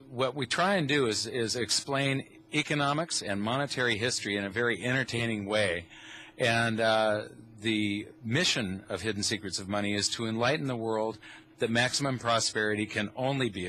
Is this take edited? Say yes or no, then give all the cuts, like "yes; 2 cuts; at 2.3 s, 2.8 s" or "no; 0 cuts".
no; 0 cuts